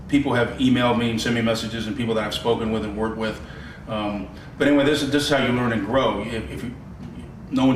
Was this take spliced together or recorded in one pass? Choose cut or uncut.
uncut